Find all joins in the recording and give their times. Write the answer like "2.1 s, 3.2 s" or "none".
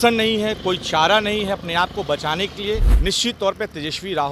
2.9 s